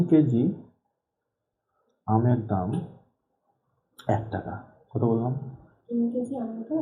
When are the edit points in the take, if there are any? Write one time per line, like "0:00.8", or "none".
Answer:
none